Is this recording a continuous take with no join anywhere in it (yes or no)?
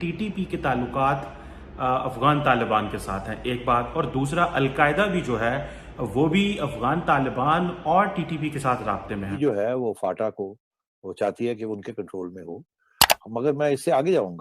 no